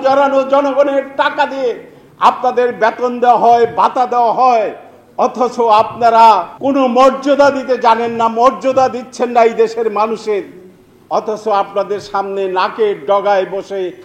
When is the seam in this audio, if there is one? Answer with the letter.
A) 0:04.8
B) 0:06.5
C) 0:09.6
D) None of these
B